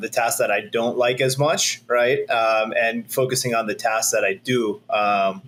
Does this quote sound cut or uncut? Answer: uncut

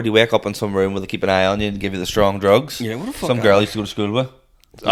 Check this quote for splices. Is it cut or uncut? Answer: uncut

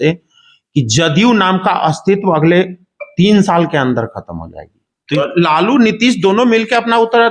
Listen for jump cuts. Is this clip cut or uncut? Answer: cut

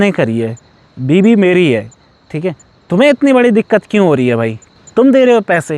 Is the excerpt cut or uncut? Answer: cut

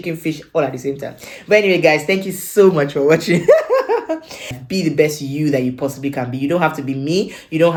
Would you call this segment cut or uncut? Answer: uncut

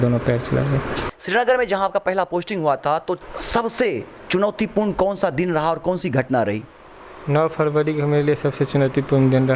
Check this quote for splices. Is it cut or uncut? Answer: cut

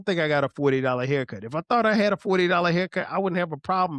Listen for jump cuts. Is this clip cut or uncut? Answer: uncut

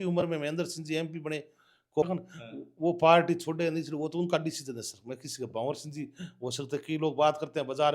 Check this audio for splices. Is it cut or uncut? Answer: cut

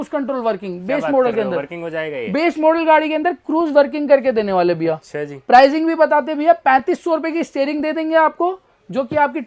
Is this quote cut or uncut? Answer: uncut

